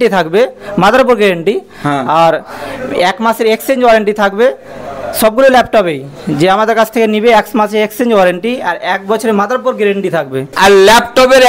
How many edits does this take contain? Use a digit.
0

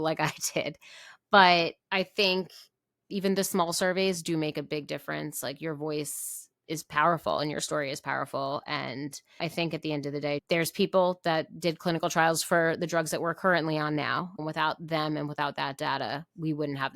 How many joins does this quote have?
2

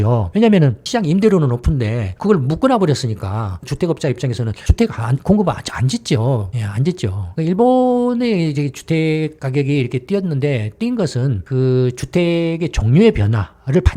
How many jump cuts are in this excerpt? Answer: 2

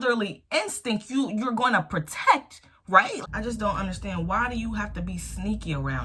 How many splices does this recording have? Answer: 1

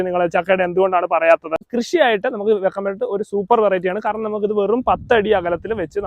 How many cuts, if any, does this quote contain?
1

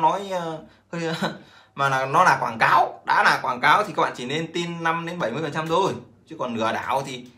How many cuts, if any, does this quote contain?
0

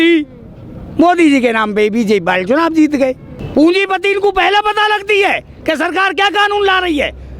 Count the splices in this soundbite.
1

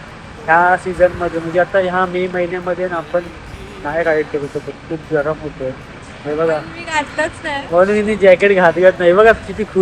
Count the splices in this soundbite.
0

